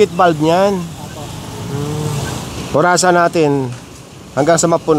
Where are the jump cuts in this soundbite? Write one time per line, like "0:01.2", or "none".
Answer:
0:02.5